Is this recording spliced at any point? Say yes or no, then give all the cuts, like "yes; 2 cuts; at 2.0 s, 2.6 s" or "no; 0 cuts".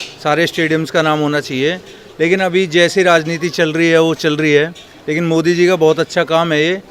no; 0 cuts